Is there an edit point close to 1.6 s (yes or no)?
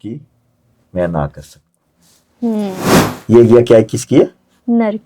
no